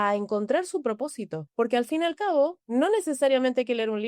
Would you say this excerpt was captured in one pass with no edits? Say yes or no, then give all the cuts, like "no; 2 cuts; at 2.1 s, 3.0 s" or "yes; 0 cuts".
no; 2 cuts; at 1.4 s, 2.6 s